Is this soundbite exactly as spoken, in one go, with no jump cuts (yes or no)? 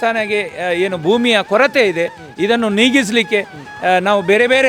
yes